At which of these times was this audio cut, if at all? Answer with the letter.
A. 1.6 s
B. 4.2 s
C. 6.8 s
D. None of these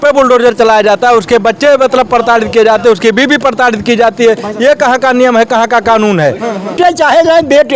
C